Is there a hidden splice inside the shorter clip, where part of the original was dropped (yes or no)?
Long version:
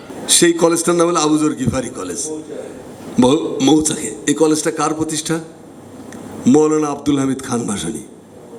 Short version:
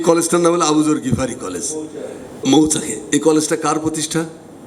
yes